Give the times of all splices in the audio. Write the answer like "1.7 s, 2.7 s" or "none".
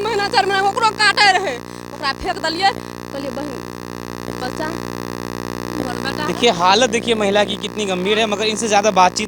none